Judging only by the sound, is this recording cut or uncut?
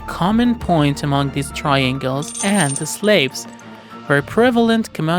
uncut